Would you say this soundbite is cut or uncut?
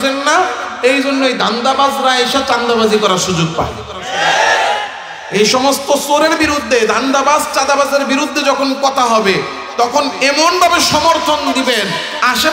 uncut